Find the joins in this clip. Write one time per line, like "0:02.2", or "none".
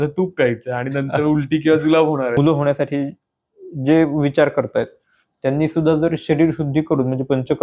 0:02.4